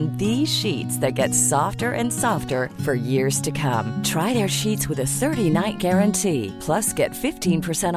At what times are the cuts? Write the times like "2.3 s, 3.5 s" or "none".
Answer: none